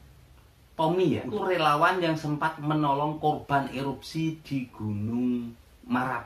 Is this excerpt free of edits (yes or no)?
no